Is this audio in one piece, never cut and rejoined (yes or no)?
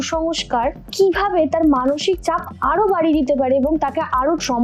yes